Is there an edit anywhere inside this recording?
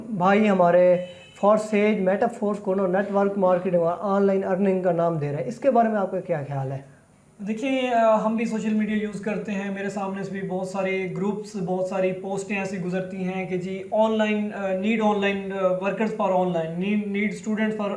no; 0 cuts

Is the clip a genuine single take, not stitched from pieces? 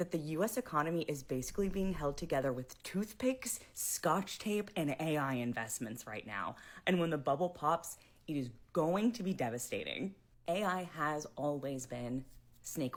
yes; 0 cuts

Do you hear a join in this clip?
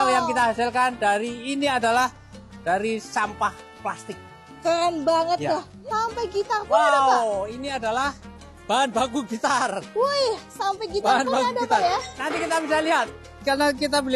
yes; 1 cut; at 5.7 s

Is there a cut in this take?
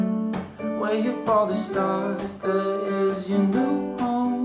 no; 0 cuts

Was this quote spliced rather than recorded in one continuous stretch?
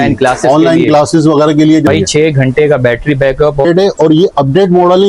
yes; 2 cuts; at 1.9 s, 3.6 s

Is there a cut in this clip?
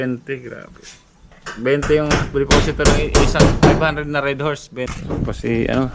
yes; 1 cut; at 4.9 s

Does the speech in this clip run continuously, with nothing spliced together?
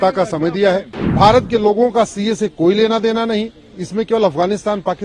no; 1 cut; at 1.0 s

